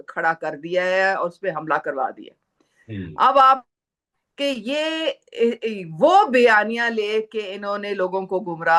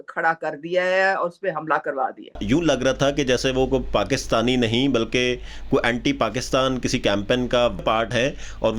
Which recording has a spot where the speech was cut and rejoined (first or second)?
second